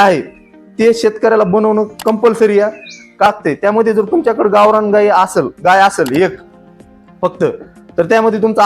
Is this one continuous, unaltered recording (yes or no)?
no